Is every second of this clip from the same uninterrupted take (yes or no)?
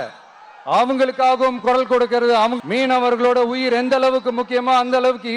no